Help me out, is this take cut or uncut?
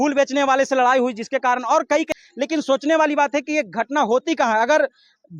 cut